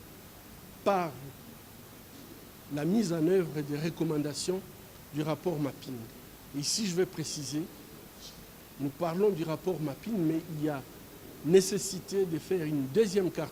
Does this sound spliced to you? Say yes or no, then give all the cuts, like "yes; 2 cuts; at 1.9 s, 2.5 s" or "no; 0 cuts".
no; 0 cuts